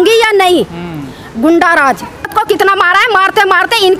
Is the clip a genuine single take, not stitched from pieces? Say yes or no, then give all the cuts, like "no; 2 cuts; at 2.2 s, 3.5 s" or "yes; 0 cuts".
no; 1 cut; at 2.3 s